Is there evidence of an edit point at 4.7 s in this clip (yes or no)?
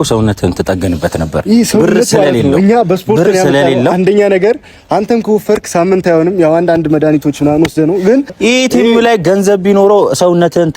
no